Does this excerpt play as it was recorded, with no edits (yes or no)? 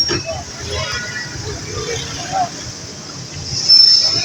yes